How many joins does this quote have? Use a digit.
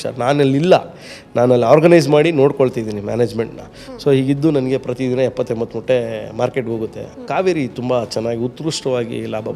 1